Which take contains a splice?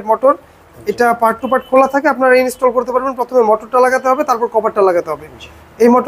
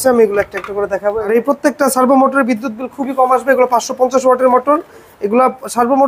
second; 1 cut; at 1.2 s

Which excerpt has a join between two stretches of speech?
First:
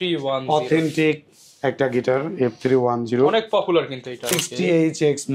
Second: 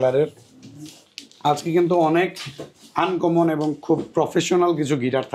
first; 1 cut; at 4.4 s

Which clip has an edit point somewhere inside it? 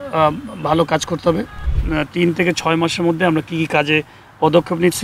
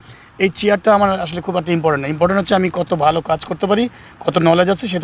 first; 1 cut; at 1.7 s

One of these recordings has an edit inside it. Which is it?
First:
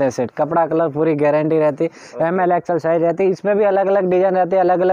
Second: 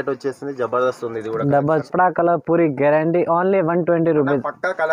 second; 1 cut; at 1.9 s

